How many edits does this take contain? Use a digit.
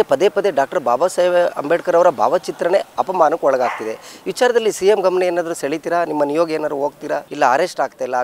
0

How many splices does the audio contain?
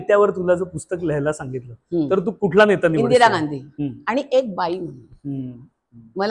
1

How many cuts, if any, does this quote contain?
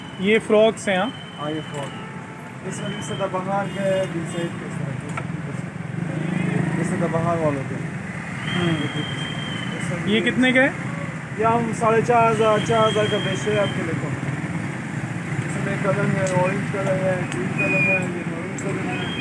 0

